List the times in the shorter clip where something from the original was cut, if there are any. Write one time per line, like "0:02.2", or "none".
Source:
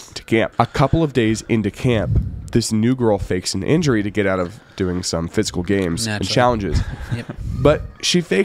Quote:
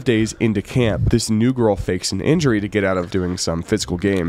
0:01.0
0:03.1